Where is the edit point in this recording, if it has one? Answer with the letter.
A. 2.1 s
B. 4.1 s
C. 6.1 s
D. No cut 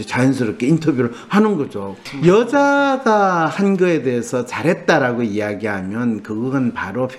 A